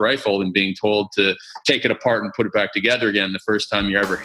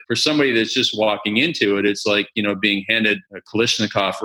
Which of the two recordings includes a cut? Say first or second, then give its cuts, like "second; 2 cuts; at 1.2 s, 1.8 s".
second; 1 cut; at 3.3 s